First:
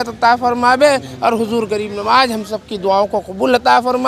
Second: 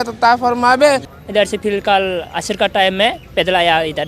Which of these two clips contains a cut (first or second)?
second